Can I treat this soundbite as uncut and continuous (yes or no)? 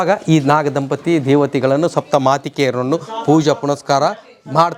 yes